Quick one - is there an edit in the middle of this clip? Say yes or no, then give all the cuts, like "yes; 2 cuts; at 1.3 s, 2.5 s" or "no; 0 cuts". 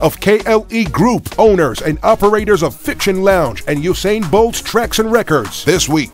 no; 0 cuts